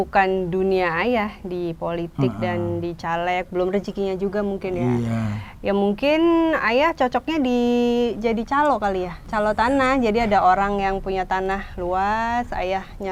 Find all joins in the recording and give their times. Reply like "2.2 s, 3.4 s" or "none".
9.2 s